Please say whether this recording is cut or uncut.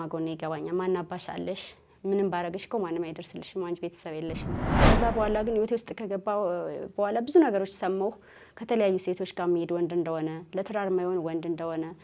cut